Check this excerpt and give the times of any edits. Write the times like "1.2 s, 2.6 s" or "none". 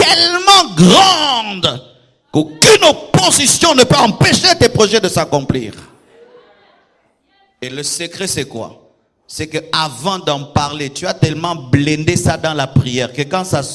none